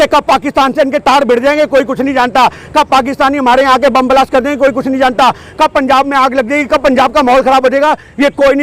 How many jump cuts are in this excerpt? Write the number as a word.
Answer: zero